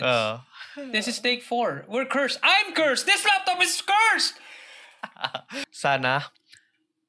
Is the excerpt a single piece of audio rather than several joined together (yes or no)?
no